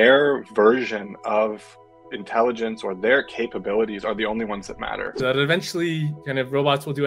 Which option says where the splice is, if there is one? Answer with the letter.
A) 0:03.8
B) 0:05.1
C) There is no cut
B